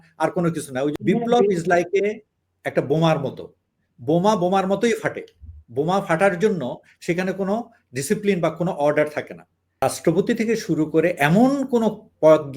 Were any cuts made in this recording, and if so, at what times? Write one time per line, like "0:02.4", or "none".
0:00.9
0:09.8